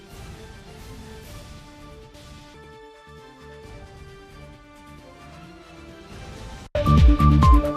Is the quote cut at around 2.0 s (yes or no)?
no